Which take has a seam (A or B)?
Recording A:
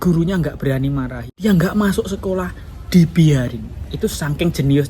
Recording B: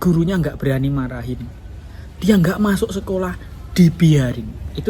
A